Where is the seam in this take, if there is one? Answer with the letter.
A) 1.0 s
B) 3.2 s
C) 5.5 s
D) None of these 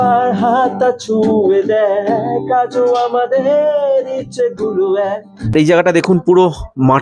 C